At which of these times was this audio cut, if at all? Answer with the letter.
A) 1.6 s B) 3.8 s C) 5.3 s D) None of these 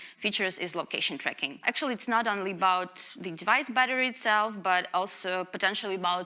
A